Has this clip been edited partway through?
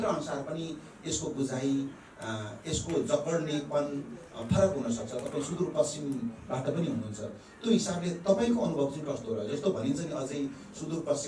no; 0 cuts

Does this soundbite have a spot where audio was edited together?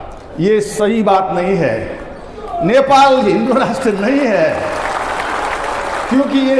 no; 0 cuts

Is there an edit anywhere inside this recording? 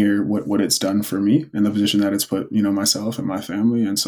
no; 0 cuts

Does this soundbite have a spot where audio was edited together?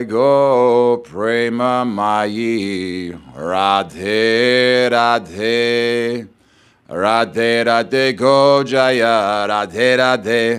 no; 0 cuts

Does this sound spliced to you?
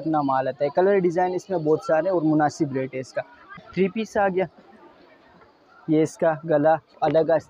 yes; 1 cut; at 3.6 s

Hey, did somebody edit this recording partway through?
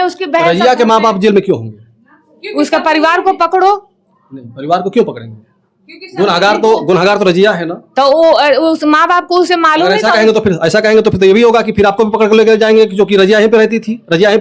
no; 0 cuts

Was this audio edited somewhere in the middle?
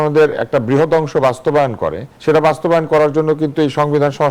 yes; 1 cut; at 2.1 s

